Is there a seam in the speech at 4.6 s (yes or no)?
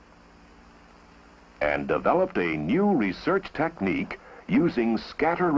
yes